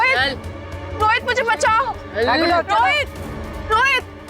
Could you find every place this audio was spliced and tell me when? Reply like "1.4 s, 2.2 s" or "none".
3.2 s